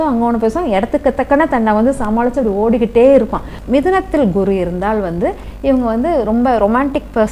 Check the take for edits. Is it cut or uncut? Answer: cut